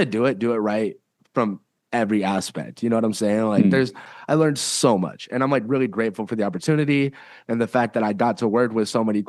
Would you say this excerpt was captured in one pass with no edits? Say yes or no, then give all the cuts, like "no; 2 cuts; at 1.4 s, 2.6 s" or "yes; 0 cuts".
no; 1 cut; at 4.1 s